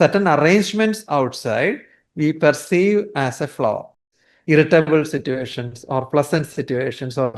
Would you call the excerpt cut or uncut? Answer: cut